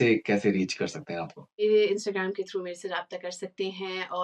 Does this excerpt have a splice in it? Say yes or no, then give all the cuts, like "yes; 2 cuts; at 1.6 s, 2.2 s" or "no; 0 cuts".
yes; 1 cut; at 1.6 s